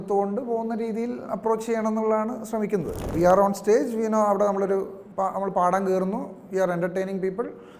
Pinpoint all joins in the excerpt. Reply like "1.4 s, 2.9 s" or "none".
3.1 s